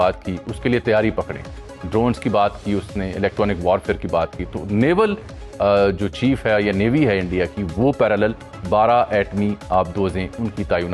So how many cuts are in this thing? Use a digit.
0